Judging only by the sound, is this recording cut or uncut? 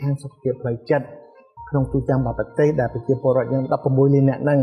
cut